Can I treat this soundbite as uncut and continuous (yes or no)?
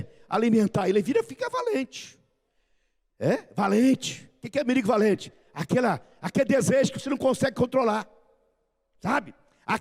yes